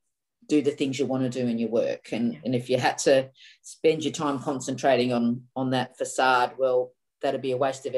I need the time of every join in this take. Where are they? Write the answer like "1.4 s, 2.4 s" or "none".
none